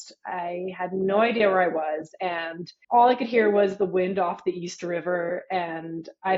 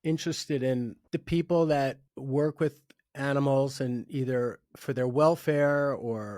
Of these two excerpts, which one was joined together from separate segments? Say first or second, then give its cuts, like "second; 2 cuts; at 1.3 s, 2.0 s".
second; 2 cuts; at 1.0 s, 2.1 s